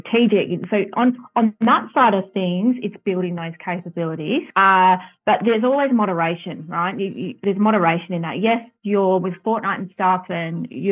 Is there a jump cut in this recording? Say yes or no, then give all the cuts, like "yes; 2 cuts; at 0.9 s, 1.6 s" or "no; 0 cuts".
yes; 2 cuts; at 1.5 s, 4.5 s